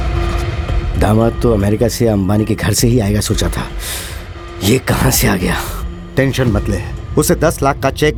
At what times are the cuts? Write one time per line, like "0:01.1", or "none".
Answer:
none